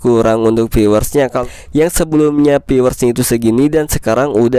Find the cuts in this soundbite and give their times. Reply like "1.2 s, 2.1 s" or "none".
1.4 s